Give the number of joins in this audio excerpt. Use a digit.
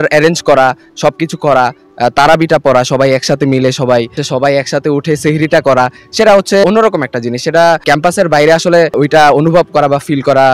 4